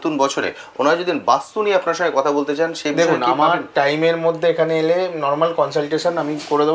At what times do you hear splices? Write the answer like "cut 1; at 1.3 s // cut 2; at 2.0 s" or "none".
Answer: none